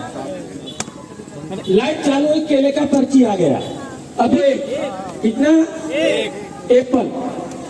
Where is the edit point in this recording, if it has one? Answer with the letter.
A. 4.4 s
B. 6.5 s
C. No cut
A